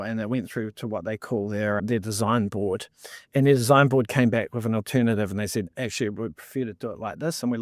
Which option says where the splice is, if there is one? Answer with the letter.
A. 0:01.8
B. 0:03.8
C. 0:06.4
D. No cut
A